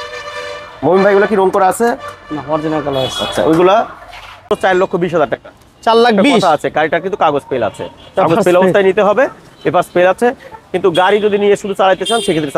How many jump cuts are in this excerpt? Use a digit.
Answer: 1